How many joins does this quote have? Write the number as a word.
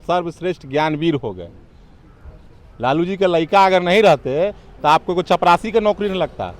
zero